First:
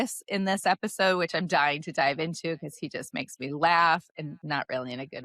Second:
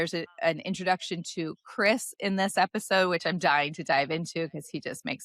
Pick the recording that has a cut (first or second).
first